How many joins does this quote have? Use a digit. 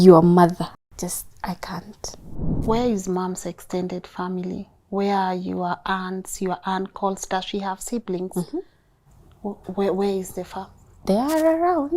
2